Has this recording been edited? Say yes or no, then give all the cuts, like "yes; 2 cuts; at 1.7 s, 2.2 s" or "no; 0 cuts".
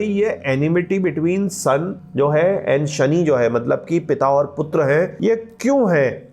yes; 2 cuts; at 2.0 s, 5.1 s